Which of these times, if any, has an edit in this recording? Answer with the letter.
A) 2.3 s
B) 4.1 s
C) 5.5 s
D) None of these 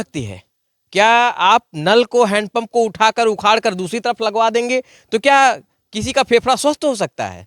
D